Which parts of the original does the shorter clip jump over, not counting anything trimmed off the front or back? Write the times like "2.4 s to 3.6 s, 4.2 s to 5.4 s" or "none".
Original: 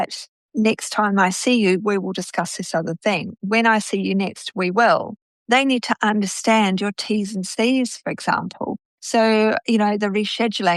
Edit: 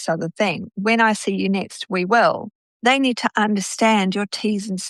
none